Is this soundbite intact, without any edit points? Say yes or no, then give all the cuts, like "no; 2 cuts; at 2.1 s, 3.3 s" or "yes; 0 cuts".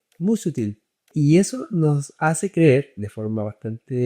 no; 1 cut; at 0.9 s